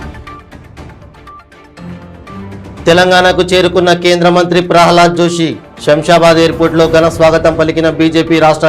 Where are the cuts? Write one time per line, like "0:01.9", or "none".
none